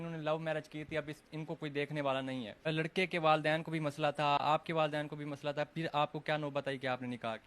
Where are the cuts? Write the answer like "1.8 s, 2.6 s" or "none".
2.6 s